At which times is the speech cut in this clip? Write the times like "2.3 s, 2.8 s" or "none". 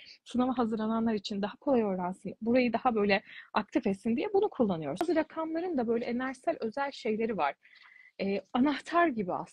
5.0 s

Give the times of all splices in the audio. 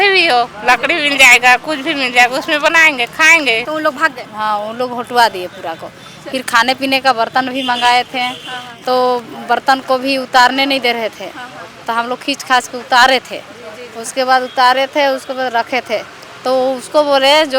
3.6 s

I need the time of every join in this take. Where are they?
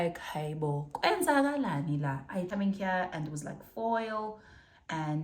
2.5 s

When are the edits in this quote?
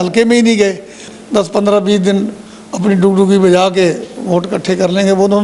1.0 s

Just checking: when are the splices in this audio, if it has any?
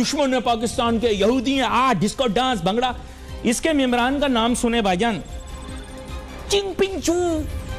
none

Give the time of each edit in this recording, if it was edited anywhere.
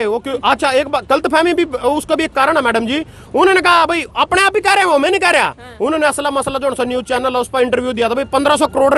none

